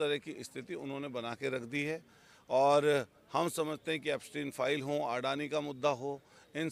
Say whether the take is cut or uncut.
uncut